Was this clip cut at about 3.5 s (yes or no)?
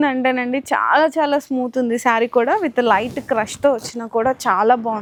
no